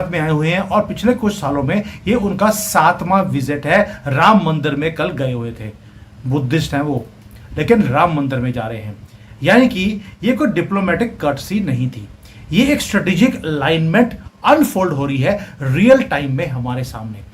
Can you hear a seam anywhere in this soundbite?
no; 0 cuts

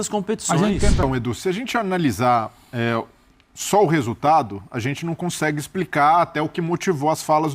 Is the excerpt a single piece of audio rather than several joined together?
no; 1 cut; at 1.0 s

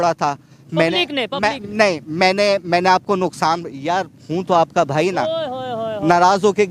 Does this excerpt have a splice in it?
no; 0 cuts

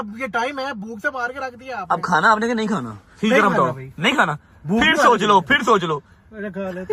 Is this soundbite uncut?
yes; 0 cuts

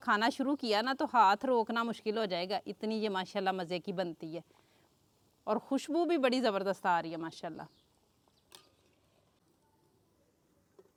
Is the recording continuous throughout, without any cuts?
yes; 0 cuts

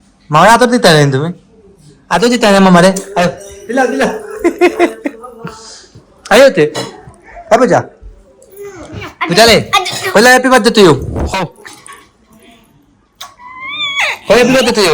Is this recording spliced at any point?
no; 0 cuts

